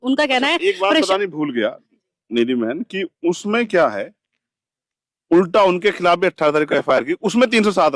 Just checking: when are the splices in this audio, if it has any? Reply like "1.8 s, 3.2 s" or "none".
none